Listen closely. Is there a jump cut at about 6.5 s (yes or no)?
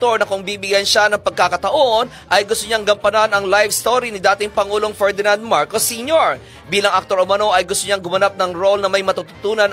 yes